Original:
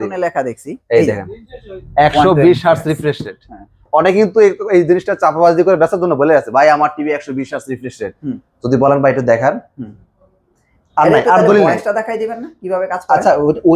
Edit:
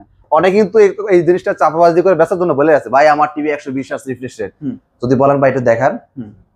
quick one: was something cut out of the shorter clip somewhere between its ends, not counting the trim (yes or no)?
no